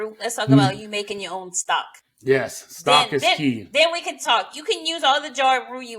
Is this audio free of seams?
yes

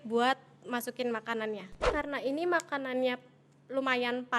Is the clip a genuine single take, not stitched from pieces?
no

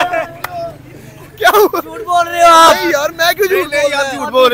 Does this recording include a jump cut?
no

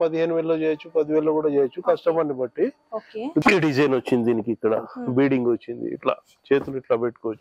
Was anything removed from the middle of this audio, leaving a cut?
yes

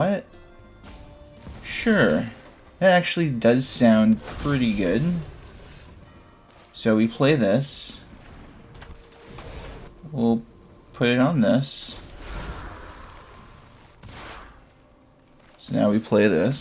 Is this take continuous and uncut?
no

